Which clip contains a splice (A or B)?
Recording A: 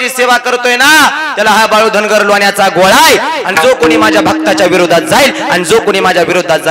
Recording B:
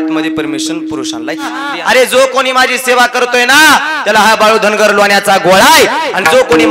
B